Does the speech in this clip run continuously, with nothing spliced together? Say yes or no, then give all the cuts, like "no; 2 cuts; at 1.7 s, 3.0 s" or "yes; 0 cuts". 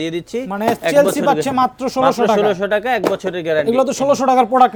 yes; 0 cuts